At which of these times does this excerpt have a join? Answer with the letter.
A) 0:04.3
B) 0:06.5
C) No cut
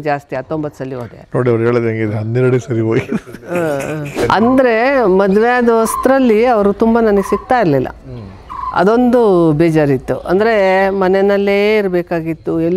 A